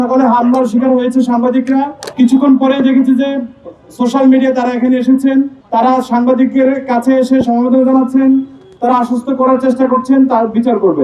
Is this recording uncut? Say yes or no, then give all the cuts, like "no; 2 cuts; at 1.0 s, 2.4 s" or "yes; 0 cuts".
yes; 0 cuts